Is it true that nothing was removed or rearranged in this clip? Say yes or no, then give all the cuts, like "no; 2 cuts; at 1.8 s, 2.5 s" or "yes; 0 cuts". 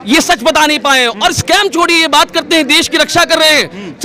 yes; 0 cuts